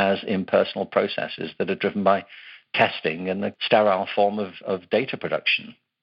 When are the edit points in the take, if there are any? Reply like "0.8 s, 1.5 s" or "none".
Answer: 3.6 s